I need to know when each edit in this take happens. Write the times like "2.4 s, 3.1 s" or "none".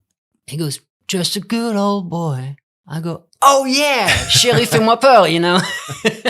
3.3 s